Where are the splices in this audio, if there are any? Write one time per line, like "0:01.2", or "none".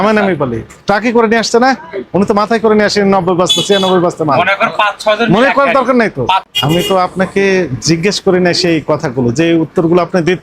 0:06.5